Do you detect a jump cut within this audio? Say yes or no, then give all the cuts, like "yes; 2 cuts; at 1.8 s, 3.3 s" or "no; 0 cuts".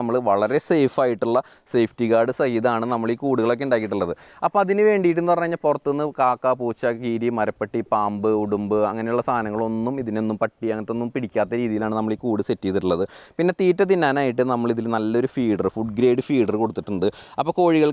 no; 0 cuts